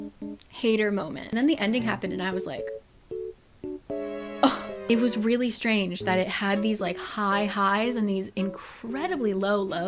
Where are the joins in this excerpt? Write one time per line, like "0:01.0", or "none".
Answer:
0:01.3
0:04.8

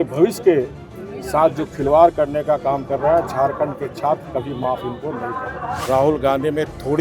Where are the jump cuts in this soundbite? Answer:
0:05.8

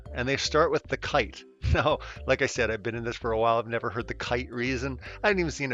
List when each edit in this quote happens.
none

